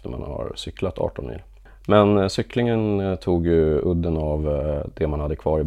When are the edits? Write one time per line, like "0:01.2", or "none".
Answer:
0:01.5